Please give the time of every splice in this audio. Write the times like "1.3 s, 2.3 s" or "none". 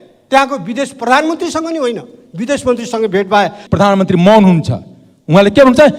3.6 s